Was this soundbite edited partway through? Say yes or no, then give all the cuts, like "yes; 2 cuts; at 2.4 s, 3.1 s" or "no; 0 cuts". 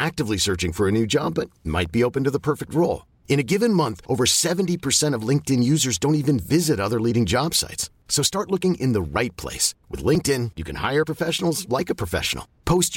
no; 0 cuts